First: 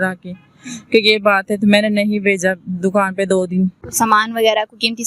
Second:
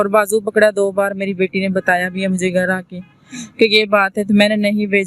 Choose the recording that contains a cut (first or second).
first